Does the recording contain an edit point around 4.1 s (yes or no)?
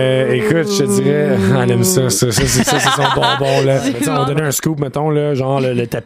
yes